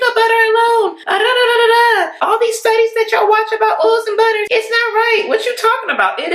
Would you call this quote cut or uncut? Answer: cut